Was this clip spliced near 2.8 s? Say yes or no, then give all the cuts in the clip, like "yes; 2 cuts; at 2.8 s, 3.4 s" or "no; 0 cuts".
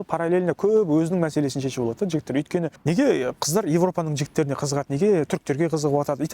yes; 1 cut; at 2.8 s